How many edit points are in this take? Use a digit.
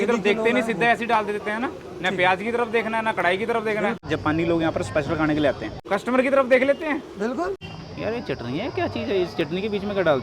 3